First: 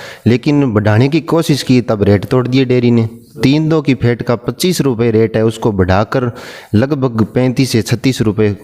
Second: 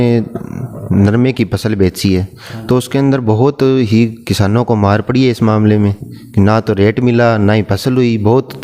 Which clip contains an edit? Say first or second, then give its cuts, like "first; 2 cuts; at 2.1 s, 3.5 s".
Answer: first; 1 cut; at 3.4 s